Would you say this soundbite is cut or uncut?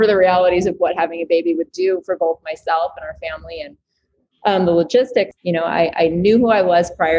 cut